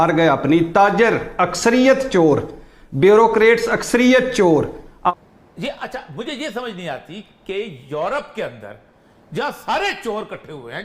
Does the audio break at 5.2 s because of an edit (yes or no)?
yes